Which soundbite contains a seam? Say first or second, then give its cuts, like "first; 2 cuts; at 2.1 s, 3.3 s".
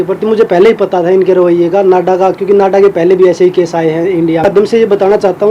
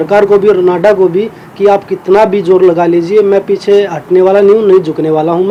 first; 1 cut; at 4.4 s